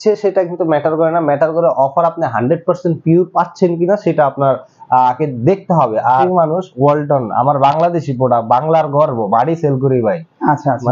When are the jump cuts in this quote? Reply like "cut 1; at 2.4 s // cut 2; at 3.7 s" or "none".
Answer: cut 1; at 6.3 s